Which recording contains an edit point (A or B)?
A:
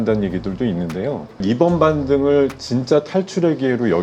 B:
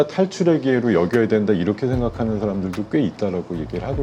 A